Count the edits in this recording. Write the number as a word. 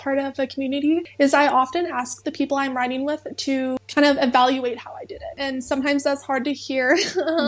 three